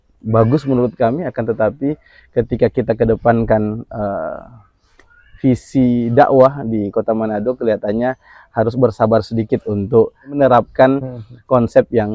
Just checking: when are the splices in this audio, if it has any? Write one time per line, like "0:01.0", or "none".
0:10.4